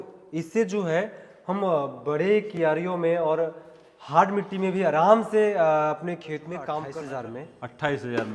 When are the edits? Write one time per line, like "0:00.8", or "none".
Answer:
0:06.8